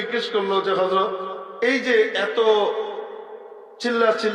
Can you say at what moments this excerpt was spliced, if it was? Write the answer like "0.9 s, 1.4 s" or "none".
1.4 s